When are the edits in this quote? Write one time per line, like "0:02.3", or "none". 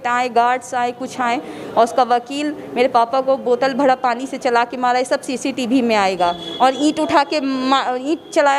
none